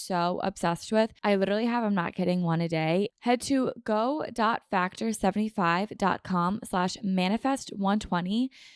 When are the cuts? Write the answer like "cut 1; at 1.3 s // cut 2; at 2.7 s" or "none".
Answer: cut 1; at 1.2 s // cut 2; at 3.1 s